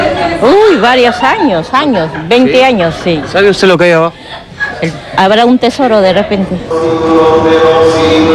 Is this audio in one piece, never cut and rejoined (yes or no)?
no